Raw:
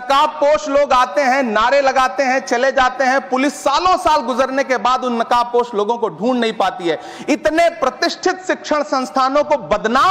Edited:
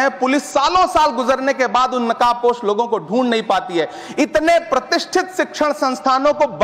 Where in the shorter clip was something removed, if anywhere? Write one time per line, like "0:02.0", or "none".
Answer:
none

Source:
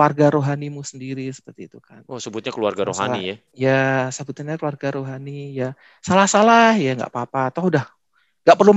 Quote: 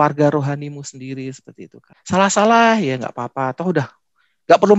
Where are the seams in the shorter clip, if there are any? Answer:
0:01.9

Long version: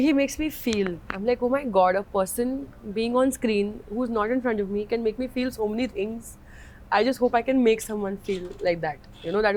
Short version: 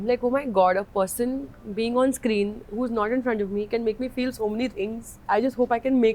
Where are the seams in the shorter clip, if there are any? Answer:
0:05.1

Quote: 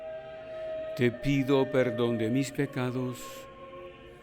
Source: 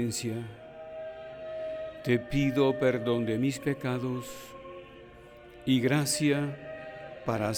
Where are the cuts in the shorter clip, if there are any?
0:01.0

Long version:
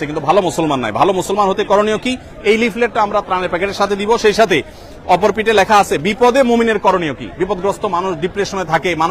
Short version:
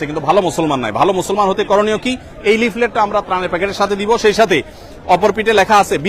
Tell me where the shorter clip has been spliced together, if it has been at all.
none

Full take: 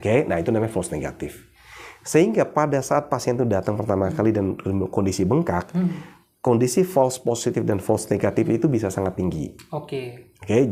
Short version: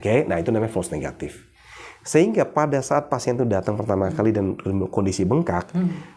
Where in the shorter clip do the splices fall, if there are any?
none

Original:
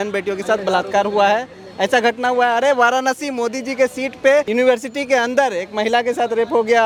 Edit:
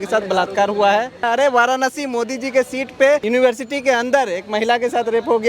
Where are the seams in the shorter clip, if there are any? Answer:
0:01.2

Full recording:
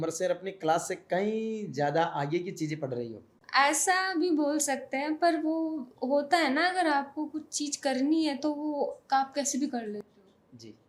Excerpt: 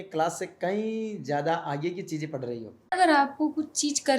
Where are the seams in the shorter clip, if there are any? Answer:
0:02.9

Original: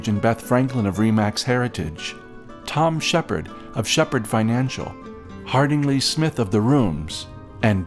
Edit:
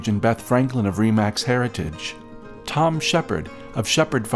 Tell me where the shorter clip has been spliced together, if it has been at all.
none

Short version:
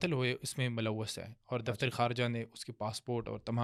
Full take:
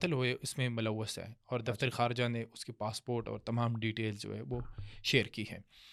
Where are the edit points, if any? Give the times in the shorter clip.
none

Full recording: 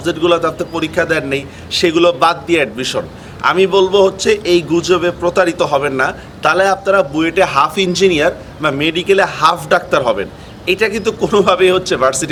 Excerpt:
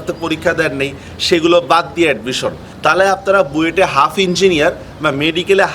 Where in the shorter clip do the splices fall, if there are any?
0:02.7

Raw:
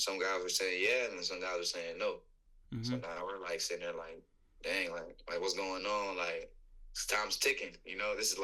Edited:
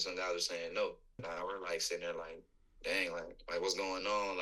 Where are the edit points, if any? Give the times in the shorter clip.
0:01.2

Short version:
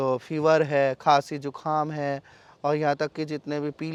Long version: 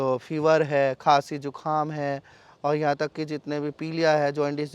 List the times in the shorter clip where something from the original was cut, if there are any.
none

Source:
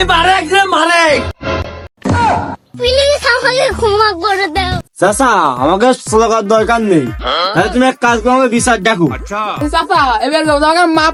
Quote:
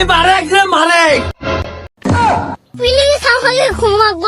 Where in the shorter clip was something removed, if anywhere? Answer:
none

